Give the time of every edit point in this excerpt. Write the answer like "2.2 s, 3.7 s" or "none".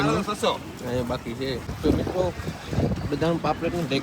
1.7 s